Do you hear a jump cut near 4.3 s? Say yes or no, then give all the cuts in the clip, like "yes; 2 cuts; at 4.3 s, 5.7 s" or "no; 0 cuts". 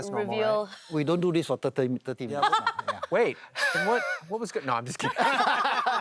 no; 0 cuts